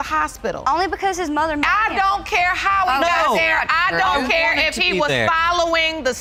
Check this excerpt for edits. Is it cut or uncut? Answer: uncut